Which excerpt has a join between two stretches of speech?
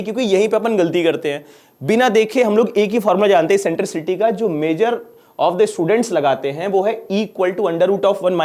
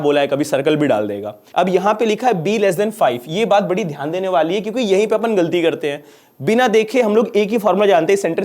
second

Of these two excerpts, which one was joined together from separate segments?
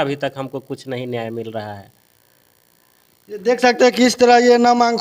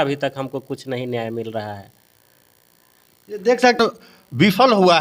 second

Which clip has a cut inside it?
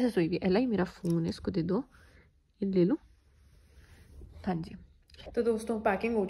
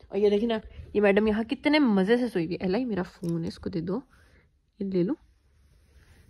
first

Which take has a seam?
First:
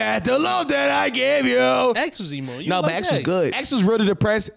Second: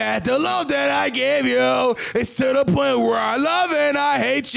first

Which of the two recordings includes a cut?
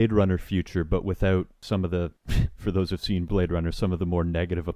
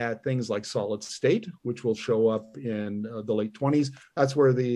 first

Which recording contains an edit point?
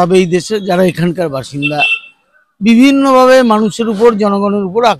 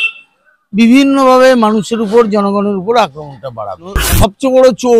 second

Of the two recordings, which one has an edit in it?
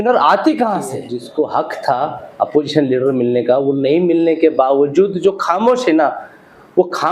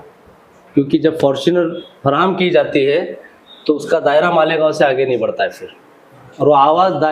first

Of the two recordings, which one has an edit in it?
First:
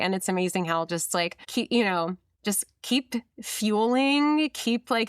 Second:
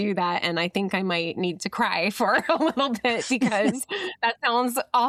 first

